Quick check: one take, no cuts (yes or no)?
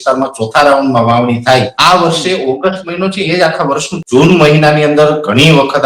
no